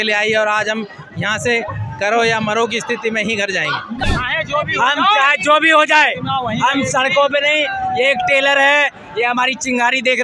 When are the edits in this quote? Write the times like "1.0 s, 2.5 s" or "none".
4.0 s